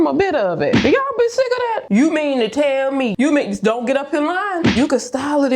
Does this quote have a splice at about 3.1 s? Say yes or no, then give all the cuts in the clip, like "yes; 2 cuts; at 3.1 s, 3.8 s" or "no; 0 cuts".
yes; 3 cuts; at 1.8 s, 3.1 s, 4.7 s